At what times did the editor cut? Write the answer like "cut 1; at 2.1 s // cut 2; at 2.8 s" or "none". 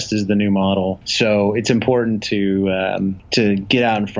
cut 1; at 1.0 s // cut 2; at 3.2 s